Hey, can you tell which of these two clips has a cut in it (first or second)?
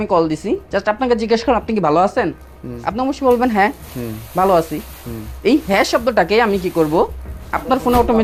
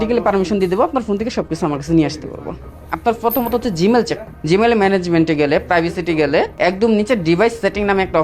second